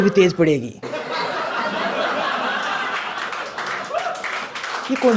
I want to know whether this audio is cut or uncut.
uncut